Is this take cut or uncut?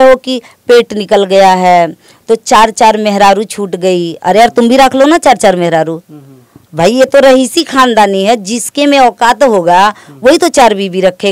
uncut